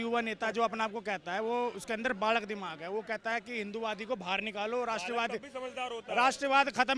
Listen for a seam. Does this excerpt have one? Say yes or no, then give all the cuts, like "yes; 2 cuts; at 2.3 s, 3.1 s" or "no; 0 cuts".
no; 0 cuts